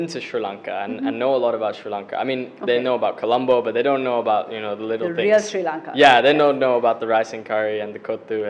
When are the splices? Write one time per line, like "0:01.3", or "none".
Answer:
none